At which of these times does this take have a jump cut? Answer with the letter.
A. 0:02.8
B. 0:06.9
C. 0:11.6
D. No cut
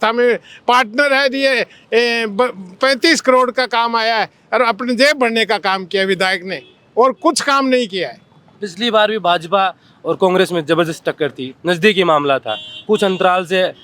D